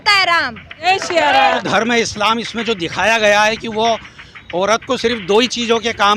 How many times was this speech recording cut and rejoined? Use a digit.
2